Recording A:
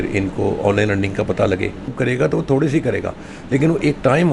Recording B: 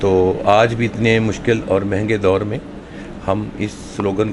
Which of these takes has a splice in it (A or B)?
A